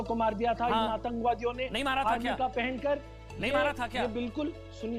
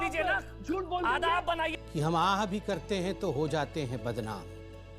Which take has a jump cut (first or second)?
second